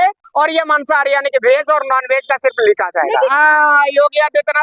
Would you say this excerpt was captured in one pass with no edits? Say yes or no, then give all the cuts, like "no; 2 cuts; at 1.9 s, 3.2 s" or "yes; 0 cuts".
no; 1 cut; at 3.3 s